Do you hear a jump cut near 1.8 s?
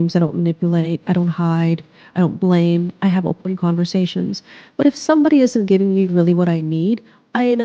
no; 0 cuts

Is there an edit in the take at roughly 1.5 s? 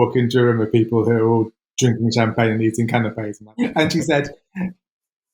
no; 1 cut; at 3.3 s

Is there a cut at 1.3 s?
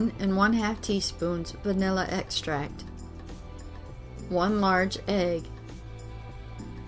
no; 3 cuts; at 2.7 s, 4.3 s, 5.4 s

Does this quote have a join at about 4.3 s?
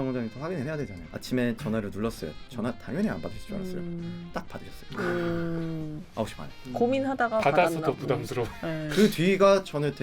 yes; 2 cuts; at 1.0 s, 4.3 s

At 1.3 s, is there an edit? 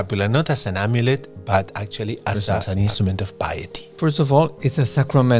no; 2 cuts; at 2.7 s, 3.9 s

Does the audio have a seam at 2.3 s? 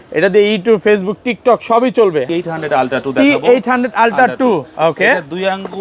yes; 1 cut; at 2.3 s

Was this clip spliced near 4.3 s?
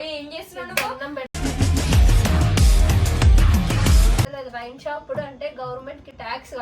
yes; 1 cut; at 4.3 s

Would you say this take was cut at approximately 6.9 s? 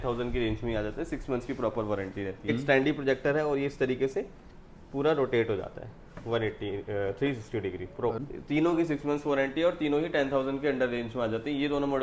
no; 2 cuts; at 2.5 s, 8.2 s

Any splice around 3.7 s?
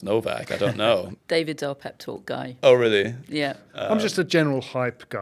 yes; 2 cuts; at 1.1 s, 3.7 s

